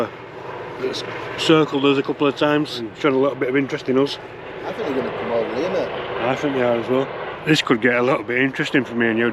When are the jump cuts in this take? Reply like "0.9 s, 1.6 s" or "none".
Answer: 2.9 s, 4.8 s, 7.3 s